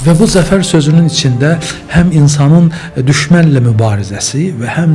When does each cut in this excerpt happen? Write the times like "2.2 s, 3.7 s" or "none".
none